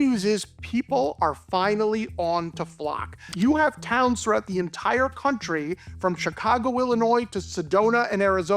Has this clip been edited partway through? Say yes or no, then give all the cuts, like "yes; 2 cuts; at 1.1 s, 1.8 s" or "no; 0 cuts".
yes; 1 cut; at 3.4 s